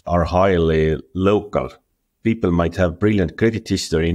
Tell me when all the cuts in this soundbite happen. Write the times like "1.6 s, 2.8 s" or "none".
2.1 s